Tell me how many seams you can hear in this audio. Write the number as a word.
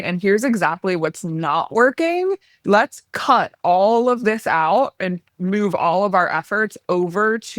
one